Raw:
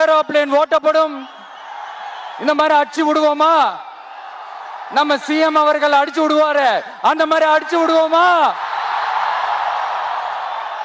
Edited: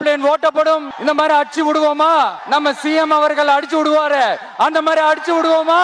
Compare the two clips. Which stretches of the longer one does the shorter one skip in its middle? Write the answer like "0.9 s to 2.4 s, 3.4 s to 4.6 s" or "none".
1.2 s to 2.3 s, 3.8 s to 4.8 s